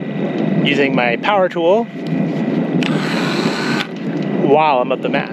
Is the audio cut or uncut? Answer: uncut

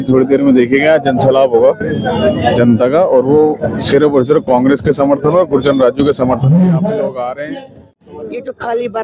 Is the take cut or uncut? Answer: cut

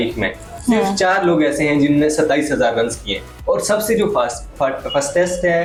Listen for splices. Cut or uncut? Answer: uncut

